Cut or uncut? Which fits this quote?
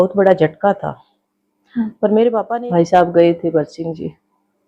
cut